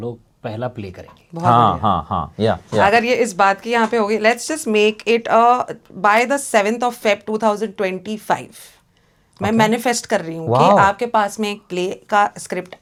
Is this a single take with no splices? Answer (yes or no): yes